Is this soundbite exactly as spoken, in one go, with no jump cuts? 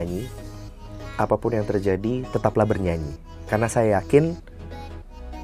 yes; 0 cuts

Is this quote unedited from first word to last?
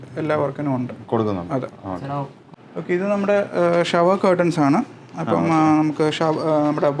no; 1 cut; at 2.4 s

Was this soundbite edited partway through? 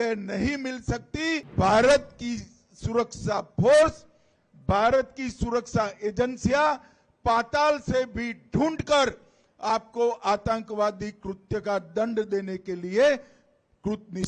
yes; 1 cut; at 1.5 s

